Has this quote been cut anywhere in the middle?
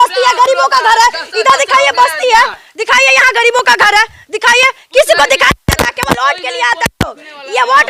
no; 0 cuts

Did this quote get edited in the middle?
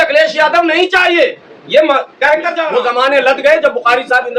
yes; 1 cut; at 2.7 s

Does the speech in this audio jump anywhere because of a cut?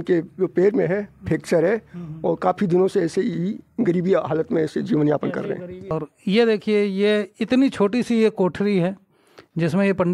no; 0 cuts

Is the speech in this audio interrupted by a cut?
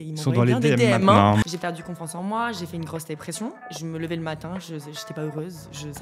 yes; 2 cuts; at 1.4 s, 3.7 s

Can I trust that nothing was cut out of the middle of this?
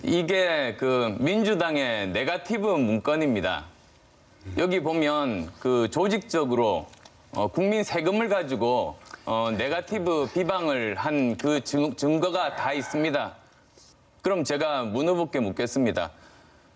no; 1 cut; at 13.1 s

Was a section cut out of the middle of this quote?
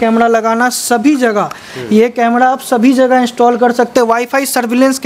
no; 0 cuts

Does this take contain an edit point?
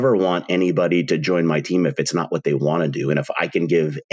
no; 0 cuts

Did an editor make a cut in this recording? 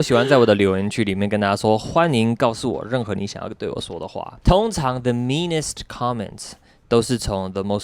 yes; 1 cut; at 4.3 s

